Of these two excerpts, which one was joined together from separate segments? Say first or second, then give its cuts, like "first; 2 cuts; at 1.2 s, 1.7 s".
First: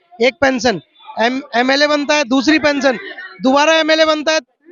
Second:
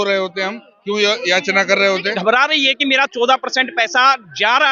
second; 1 cut; at 2.1 s